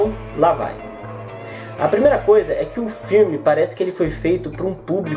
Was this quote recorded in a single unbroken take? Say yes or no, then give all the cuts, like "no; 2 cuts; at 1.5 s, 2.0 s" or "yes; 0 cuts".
yes; 0 cuts